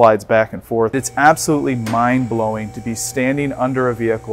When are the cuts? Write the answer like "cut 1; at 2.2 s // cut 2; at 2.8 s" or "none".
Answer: cut 1; at 0.9 s